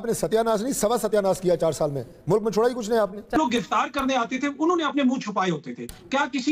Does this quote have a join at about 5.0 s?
no; 1 cut; at 3.3 s

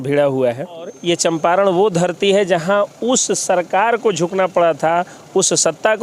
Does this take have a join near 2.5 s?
no; 1 cut; at 1.0 s

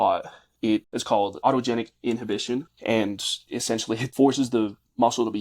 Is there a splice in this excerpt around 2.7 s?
yes; 3 cuts; at 1.4 s, 2.7 s, 3.9 s

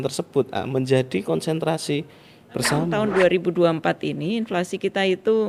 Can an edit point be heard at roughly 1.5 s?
no; 1 cut; at 2.9 s

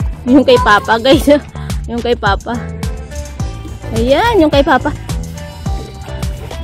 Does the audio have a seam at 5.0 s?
yes; 3 cuts; at 2.6 s, 3.9 s, 5.0 s

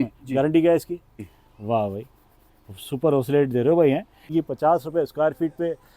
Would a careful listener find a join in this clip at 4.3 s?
yes; 2 cuts; at 1.1 s, 4.3 s

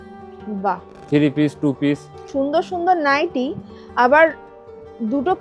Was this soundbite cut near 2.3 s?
yes; 1 cut; at 2.3 s

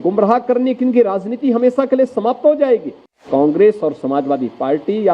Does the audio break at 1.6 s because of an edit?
no; 1 cut; at 3.2 s

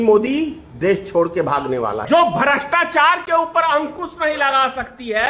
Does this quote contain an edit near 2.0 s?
yes; 1 cut; at 2.0 s

